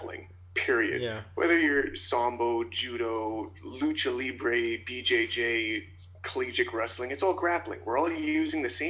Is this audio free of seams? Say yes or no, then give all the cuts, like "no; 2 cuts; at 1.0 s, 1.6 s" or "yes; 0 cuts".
yes; 0 cuts